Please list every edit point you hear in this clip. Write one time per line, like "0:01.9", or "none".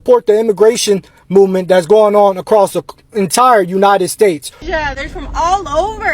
0:04.7